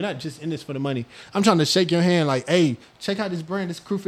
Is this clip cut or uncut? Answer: uncut